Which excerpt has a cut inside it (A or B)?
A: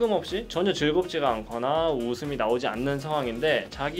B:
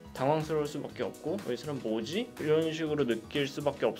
B